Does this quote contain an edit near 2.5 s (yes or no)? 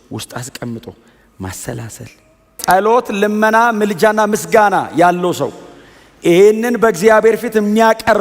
yes